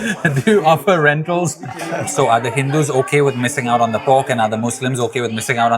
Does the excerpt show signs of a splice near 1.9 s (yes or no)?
yes